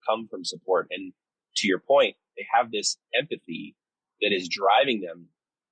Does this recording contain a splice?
no; 0 cuts

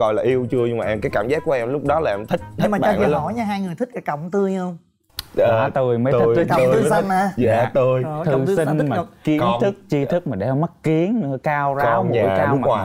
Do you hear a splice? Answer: no; 0 cuts

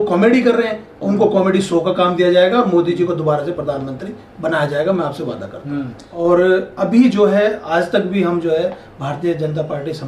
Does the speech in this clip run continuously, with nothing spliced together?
yes; 0 cuts

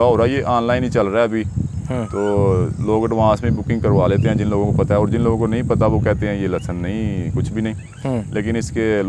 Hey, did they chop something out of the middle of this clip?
no; 0 cuts

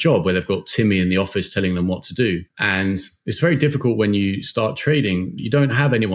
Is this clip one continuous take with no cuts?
no; 1 cut; at 2.5 s

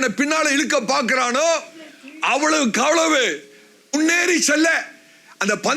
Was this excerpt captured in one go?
no; 1 cut; at 3.9 s

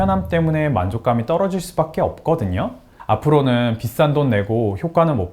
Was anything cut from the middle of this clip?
yes; 1 cut; at 2.9 s

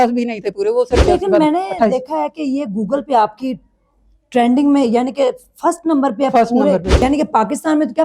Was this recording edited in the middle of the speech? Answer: yes; 2 cuts; at 1.1 s, 7.0 s

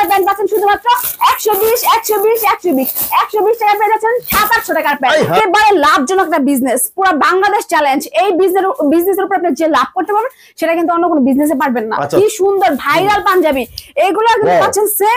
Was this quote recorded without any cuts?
no; 2 cuts; at 5.4 s, 12.1 s

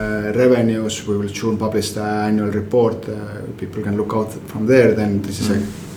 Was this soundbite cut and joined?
no; 0 cuts

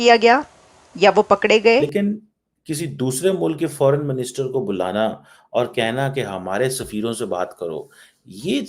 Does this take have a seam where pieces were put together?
yes; 1 cut; at 1.9 s

